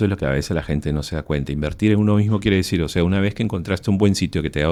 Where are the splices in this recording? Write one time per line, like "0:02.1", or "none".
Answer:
none